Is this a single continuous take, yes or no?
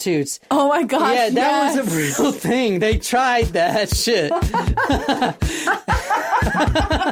yes